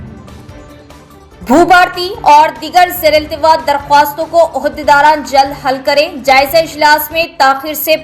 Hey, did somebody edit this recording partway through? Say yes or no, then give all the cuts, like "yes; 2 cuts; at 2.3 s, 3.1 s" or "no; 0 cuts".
yes; 1 cut; at 1.0 s